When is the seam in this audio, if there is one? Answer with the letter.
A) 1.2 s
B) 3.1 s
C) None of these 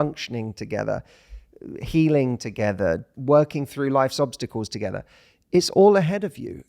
B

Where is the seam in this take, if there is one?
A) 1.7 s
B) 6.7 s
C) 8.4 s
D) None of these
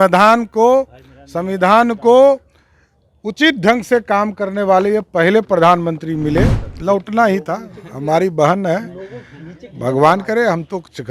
B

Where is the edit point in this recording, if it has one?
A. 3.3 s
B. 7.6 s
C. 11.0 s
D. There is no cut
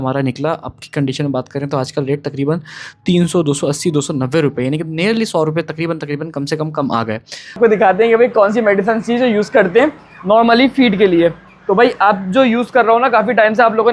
B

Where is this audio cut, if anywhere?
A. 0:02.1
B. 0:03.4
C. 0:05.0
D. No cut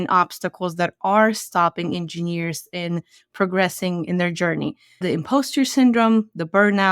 C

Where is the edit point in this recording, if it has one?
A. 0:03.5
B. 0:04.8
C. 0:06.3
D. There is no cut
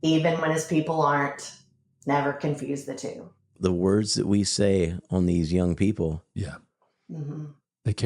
A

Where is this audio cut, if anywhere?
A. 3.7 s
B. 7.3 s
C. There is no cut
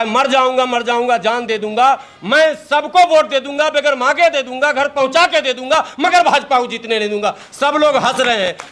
C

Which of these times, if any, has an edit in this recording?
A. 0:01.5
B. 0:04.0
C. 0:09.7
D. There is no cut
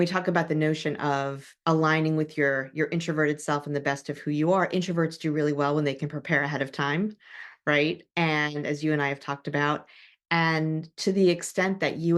A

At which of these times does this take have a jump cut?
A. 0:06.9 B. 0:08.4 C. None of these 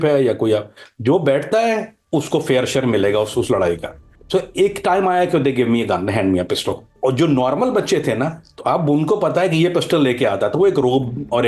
A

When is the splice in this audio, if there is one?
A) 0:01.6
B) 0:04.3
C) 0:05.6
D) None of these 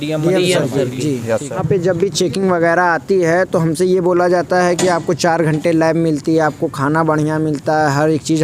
A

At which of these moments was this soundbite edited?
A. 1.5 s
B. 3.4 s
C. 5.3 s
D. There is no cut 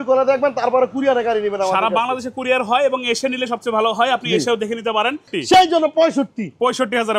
C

